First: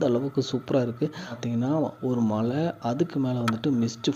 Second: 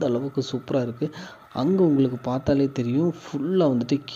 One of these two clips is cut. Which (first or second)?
first